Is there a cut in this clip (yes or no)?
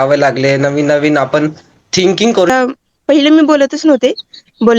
yes